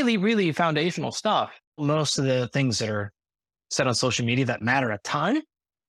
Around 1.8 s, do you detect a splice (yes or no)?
yes